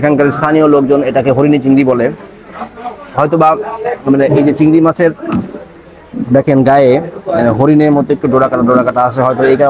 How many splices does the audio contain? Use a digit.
0